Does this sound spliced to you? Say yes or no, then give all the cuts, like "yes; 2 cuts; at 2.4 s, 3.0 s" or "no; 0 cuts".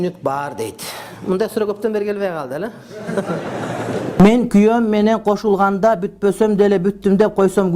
yes; 1 cut; at 4.1 s